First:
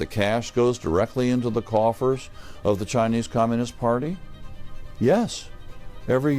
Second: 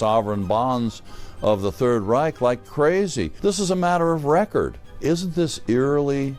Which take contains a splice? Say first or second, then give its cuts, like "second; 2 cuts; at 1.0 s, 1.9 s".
second; 2 cuts; at 3.3 s, 4.8 s